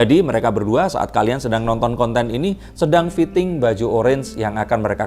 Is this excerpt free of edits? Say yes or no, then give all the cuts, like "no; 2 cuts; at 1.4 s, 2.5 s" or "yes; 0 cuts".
yes; 0 cuts